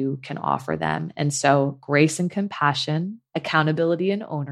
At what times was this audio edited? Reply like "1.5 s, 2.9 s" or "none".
3.2 s